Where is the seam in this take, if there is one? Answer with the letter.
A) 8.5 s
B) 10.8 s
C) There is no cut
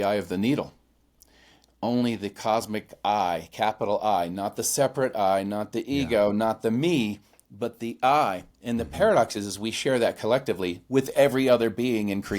A